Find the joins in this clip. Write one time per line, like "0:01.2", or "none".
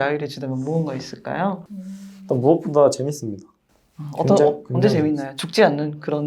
0:01.6

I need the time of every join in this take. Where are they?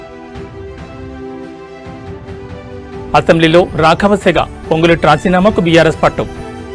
0:02.9

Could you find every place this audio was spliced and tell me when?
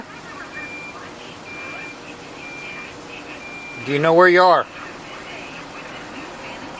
none

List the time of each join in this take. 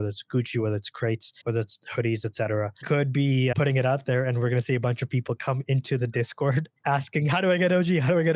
0:01.3
0:02.8
0:06.7

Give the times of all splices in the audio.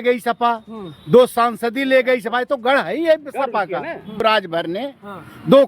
0:04.2

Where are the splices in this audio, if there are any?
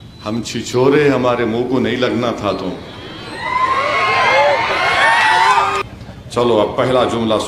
0:05.8

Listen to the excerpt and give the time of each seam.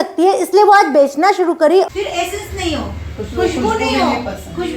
0:01.9

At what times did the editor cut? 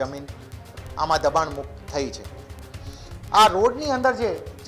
none

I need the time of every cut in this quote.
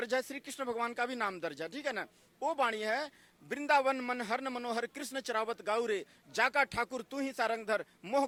none

